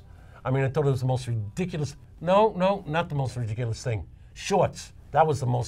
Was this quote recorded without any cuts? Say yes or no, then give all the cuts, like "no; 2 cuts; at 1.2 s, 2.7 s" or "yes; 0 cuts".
yes; 0 cuts